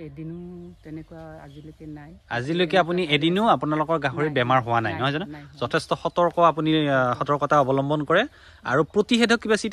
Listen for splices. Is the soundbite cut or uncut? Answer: uncut